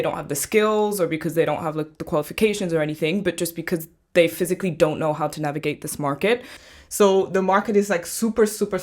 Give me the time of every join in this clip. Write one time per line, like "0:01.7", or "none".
0:06.6